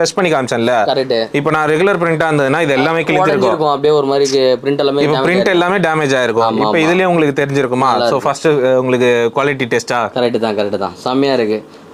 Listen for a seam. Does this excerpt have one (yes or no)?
no